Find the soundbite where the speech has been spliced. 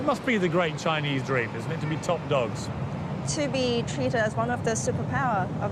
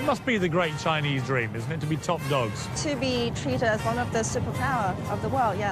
second; 1 cut; at 2.7 s

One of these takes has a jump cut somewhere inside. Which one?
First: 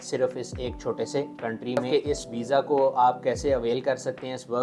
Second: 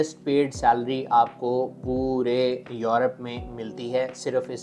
first; 1 cut; at 1.8 s

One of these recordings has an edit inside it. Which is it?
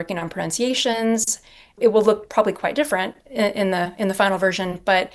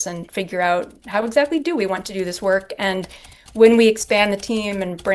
first; 1 cut; at 1.7 s

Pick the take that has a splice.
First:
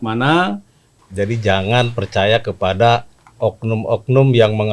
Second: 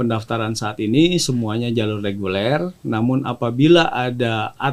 first; 1 cut; at 1.0 s

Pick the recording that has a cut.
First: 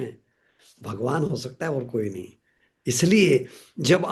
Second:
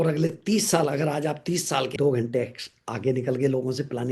second; 1 cut; at 1.9 s

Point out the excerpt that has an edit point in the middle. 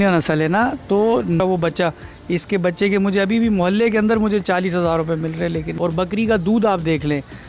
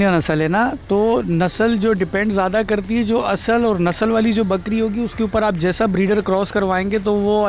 first; 2 cuts; at 1.4 s, 5.7 s

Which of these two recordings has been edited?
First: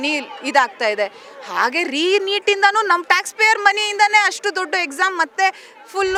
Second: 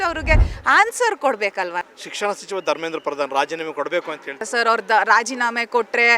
second; 2 cuts; at 1.8 s, 4.4 s

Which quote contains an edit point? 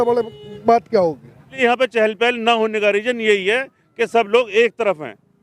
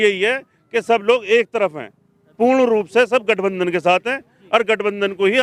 first; 1 cut; at 1.6 s

